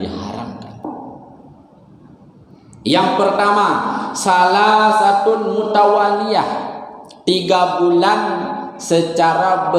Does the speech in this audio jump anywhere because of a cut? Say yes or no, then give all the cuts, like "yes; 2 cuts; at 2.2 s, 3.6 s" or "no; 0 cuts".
no; 0 cuts